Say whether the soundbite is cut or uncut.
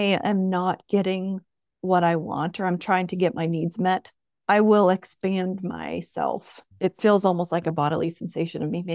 uncut